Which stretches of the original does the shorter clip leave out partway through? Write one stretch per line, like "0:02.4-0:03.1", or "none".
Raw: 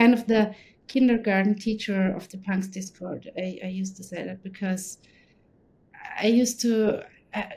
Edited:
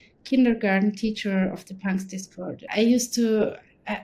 0:03.2-0:06.1